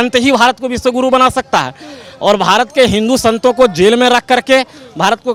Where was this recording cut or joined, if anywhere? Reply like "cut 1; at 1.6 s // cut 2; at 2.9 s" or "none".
none